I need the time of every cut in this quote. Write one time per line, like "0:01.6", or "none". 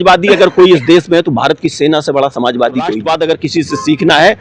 0:03.0